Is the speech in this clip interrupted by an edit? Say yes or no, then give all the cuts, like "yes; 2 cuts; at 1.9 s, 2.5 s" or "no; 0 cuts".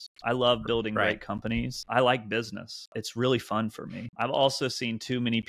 yes; 3 cuts; at 1.8 s, 3.0 s, 4.1 s